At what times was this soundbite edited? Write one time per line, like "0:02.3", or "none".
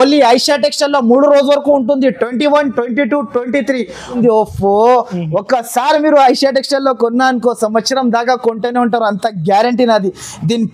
0:04.1